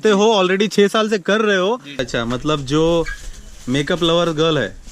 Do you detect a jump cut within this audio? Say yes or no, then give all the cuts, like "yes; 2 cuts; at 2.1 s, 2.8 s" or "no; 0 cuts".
yes; 1 cut; at 2.0 s